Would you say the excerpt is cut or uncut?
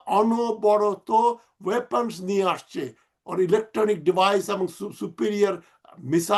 uncut